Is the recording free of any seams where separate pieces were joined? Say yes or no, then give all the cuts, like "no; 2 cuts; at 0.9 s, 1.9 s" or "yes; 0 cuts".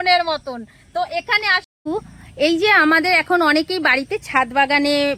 no; 1 cut; at 1.7 s